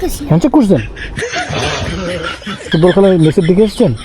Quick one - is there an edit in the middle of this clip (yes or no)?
yes